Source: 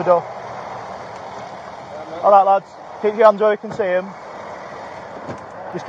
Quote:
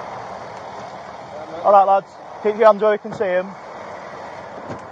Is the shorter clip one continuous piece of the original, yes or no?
yes